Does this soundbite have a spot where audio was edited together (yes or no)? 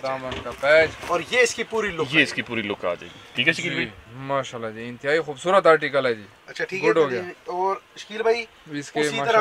no